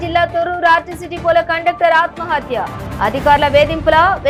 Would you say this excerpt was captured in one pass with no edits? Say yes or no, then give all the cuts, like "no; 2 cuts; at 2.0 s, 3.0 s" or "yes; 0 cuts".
yes; 0 cuts